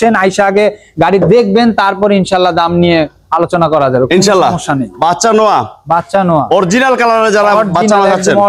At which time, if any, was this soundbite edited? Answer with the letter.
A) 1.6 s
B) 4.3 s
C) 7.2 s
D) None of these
D